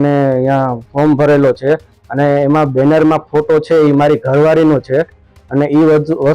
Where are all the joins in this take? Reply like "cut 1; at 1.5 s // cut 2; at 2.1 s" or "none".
none